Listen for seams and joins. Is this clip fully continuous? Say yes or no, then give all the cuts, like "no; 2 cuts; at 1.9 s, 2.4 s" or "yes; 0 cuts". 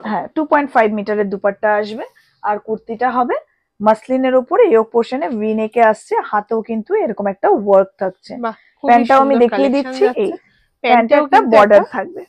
yes; 0 cuts